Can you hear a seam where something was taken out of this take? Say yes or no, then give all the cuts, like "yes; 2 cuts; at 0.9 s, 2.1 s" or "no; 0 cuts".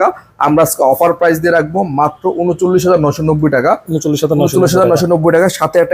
no; 0 cuts